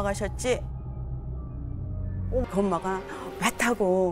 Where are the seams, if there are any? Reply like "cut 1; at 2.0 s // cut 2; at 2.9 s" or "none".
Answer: cut 1; at 2.4 s